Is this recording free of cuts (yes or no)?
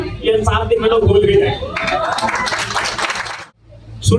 no